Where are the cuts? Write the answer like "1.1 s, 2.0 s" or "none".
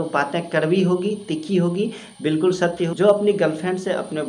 2.9 s